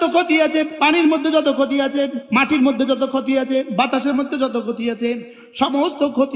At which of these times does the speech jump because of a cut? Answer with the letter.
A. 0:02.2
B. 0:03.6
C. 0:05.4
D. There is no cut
A